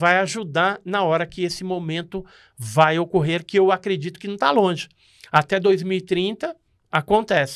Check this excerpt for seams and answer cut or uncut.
uncut